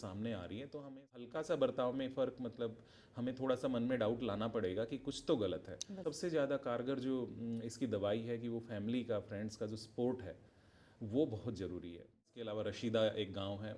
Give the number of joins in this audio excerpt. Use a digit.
3